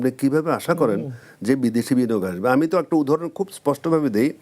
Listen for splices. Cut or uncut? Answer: uncut